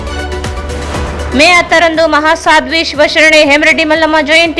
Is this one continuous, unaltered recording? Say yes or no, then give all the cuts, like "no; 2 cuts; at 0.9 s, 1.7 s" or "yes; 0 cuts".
no; 1 cut; at 1.1 s